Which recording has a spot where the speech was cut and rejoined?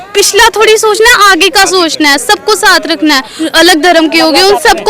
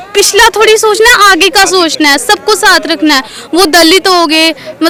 first; 1 cut; at 3.4 s

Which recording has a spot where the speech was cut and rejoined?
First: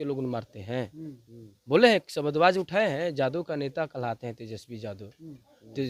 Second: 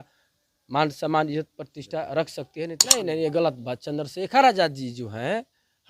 second; 1 cut; at 2.8 s

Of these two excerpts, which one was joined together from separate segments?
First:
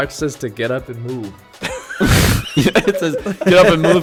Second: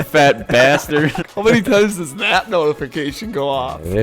second; 1 cut; at 1.2 s

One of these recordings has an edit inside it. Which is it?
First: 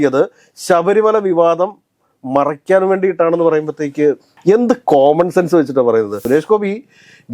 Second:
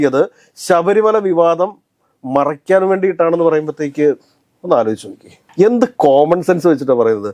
first; 2 cuts; at 4.3 s, 6.2 s

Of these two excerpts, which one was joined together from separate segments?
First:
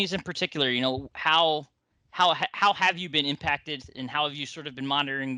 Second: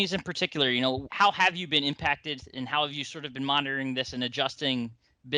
second; 1 cut; at 1.1 s

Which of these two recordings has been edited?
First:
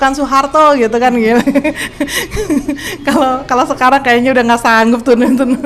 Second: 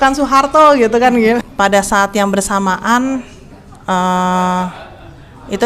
second; 1 cut; at 1.4 s

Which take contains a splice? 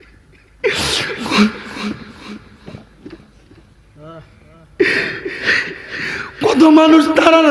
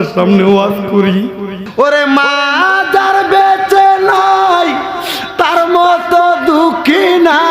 second; 1 cut; at 1.6 s

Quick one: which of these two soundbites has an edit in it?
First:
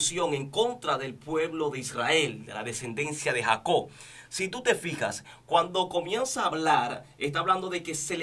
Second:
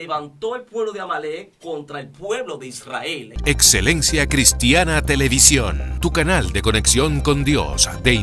second; 1 cut; at 3.3 s

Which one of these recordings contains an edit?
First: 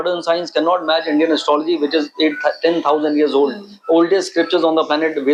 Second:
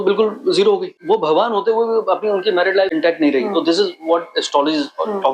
second; 2 cuts; at 1.0 s, 2.9 s

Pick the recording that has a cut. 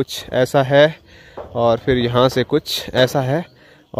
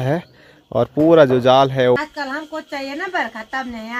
second; 1 cut; at 2.0 s

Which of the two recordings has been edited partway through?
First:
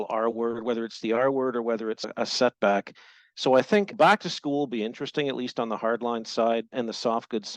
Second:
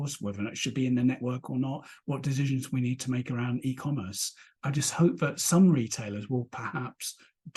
first; 2 cuts; at 2.0 s, 6.7 s

